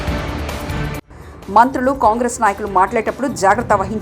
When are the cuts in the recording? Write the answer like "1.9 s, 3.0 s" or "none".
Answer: 1.1 s